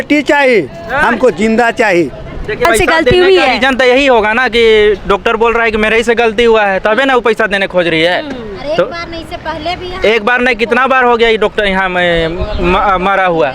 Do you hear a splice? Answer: yes; 1 cut; at 2.6 s

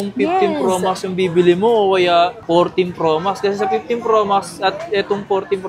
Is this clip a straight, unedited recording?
yes; 0 cuts

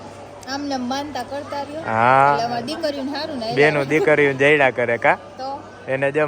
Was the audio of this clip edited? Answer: no; 0 cuts

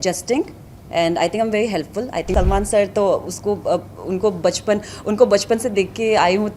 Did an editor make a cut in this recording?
yes; 1 cut; at 2.3 s

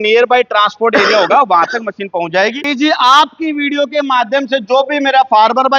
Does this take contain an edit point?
yes; 1 cut; at 2.7 s

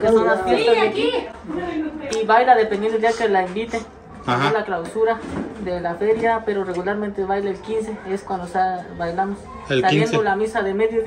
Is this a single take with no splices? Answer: yes; 0 cuts

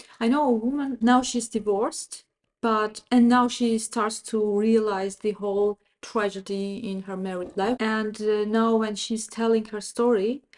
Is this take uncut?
no; 2 cuts; at 1.0 s, 7.8 s

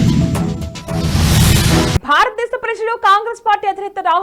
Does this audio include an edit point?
no; 0 cuts

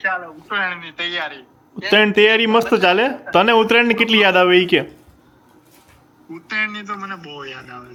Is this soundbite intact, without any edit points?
yes; 0 cuts

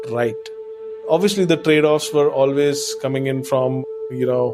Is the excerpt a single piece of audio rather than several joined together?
no; 1 cut; at 1.0 s

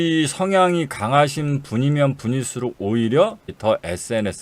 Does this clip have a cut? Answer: yes; 1 cut; at 3.5 s

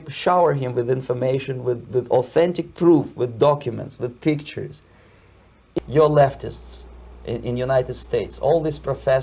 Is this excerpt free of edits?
no; 1 cut; at 5.8 s

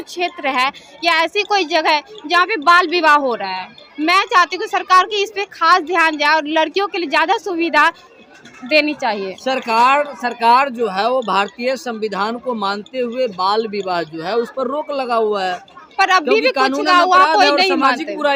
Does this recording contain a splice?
no; 0 cuts

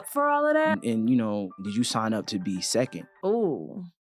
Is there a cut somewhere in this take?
yes; 3 cuts; at 0.8 s, 1.6 s, 3.0 s

